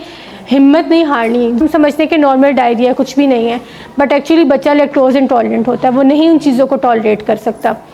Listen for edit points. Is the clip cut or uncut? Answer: cut